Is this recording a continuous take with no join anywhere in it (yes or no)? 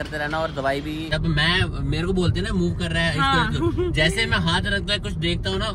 no